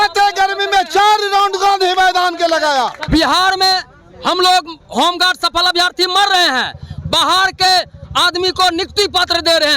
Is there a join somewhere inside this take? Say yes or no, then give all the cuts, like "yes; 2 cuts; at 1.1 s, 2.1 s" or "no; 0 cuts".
yes; 1 cut; at 3.1 s